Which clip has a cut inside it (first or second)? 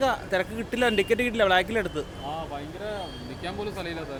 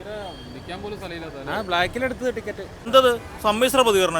second